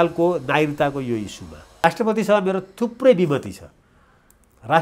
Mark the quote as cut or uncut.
cut